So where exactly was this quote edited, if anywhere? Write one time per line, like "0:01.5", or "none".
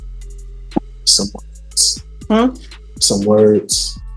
none